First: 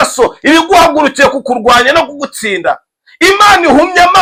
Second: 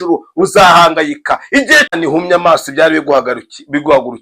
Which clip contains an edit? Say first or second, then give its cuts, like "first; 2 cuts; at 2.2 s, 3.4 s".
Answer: second; 1 cut; at 2.0 s